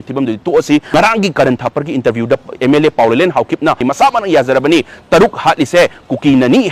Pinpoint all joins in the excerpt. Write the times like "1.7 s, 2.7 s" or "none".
0.9 s, 3.8 s